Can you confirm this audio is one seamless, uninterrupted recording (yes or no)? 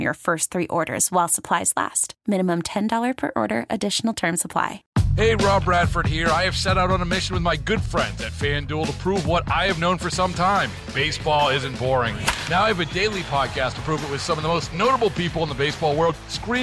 no